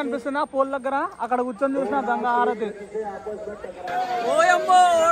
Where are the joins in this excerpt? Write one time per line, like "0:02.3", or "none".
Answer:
0:03.9